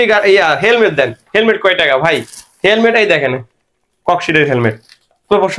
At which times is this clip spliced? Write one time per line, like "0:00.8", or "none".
none